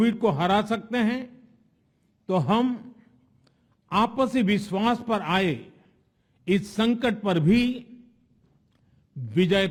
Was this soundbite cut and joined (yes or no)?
no